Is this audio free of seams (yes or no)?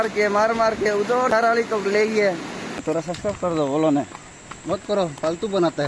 no